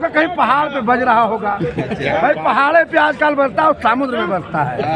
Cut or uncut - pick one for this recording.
uncut